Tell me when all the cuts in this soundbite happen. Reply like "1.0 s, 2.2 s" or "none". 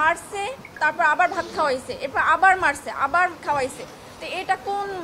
none